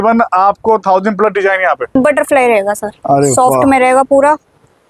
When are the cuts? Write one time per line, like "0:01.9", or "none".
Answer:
0:01.9